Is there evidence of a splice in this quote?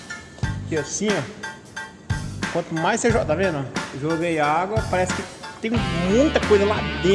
no; 0 cuts

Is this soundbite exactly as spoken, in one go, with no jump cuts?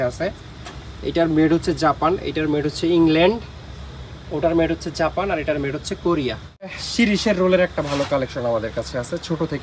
no; 1 cut; at 6.8 s

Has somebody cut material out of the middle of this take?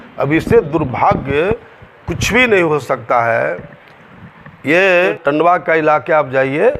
yes; 1 cut; at 5.1 s

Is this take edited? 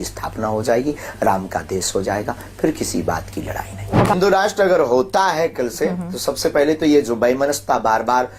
yes; 1 cut; at 4.1 s

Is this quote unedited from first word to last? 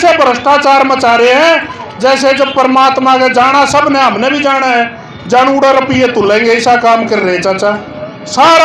yes; 0 cuts

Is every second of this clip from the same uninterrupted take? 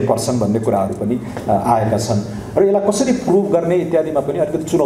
yes; 0 cuts

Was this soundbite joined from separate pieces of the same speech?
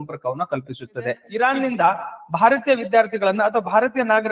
yes; 1 cut; at 1.2 s

